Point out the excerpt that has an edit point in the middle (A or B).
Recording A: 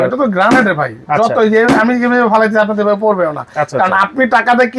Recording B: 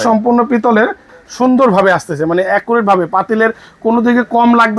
B